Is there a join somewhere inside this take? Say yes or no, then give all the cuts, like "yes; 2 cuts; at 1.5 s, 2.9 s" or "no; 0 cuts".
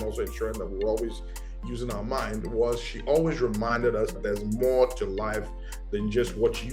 yes; 1 cut; at 4.1 s